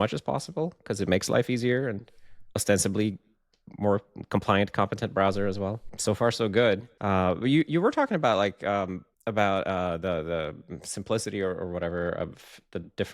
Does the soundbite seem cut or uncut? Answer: cut